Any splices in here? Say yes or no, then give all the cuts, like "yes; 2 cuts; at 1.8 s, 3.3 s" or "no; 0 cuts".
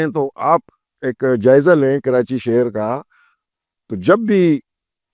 no; 0 cuts